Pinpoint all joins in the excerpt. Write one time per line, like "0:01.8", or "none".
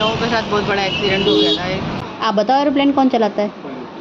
0:02.0